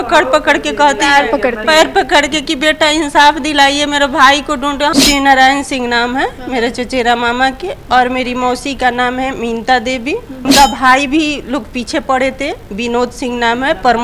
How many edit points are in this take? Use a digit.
2